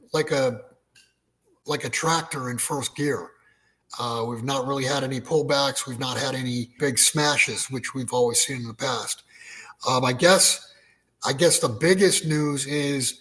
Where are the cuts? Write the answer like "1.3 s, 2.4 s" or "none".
6.8 s